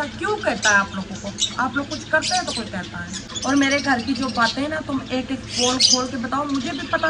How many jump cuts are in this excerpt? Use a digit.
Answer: 1